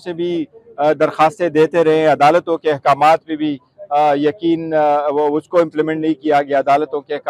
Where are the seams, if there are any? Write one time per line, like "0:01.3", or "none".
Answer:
none